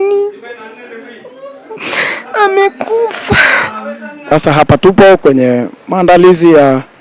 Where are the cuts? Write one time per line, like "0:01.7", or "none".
0:04.3